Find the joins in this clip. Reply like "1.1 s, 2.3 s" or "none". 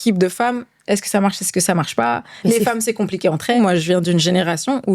3.6 s